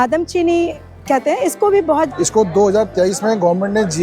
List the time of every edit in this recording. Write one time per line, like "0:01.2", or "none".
0:02.1